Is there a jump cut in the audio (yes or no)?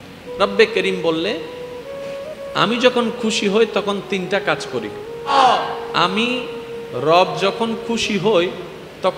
yes